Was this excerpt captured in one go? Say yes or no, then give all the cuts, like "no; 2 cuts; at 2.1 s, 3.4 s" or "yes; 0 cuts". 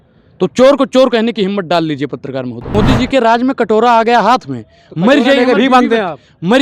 no; 1 cut; at 2.7 s